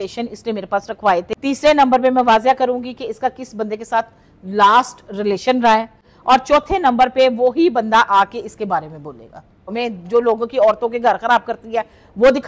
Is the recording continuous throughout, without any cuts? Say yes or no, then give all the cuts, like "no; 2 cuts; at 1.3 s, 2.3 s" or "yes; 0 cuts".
no; 2 cuts; at 1.3 s, 9.7 s